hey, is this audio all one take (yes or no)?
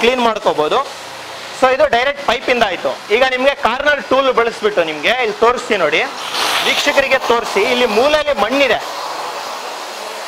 yes